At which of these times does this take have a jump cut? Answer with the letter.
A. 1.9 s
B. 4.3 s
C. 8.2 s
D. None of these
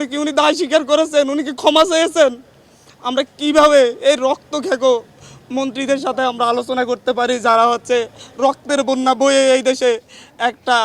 A